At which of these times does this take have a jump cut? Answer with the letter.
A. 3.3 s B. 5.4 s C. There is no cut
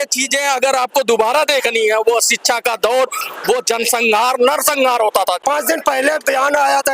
B